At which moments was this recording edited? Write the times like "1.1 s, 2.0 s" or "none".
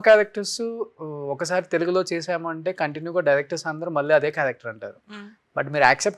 none